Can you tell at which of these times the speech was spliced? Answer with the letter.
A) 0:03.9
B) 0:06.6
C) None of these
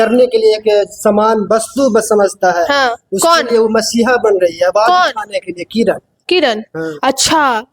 C